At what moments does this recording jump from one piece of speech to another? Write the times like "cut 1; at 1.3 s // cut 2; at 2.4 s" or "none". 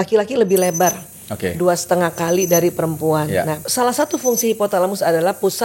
cut 1; at 3.6 s